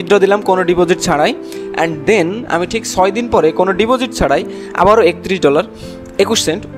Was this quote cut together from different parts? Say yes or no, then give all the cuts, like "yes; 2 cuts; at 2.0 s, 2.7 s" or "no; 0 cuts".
no; 0 cuts